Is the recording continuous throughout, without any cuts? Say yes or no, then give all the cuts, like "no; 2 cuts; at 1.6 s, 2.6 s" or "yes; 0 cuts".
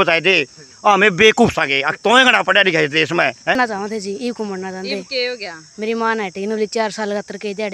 no; 1 cut; at 3.6 s